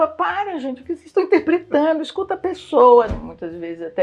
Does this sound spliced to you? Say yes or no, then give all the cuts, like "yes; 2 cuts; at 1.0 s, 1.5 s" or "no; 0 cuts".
yes; 1 cut; at 3.1 s